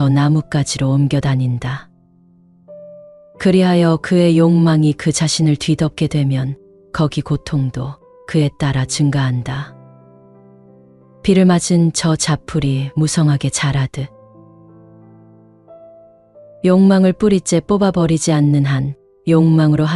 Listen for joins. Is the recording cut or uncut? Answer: uncut